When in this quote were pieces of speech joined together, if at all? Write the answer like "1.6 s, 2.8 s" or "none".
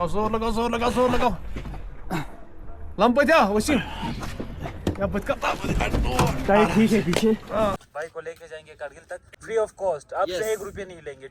7.8 s, 9.3 s

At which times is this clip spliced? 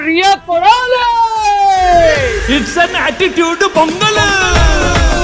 none

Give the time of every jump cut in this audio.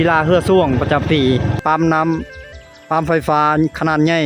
1.6 s

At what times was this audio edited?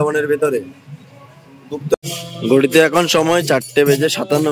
1.9 s

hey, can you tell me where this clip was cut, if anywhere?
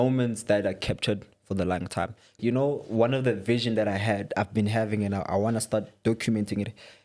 2.4 s

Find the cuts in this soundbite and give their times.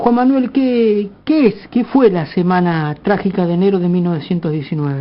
2.7 s

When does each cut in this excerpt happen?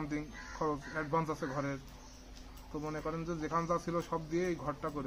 none

